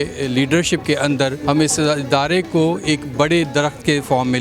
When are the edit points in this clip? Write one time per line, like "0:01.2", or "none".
0:01.4